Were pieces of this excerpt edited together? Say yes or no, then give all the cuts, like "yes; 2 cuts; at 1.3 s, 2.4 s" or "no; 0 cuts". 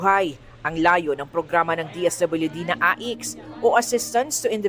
yes; 1 cut; at 2.3 s